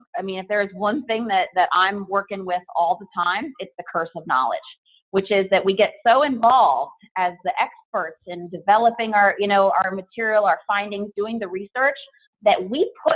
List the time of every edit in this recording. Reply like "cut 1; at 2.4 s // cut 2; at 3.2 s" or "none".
none